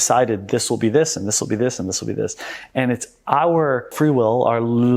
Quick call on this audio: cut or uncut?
cut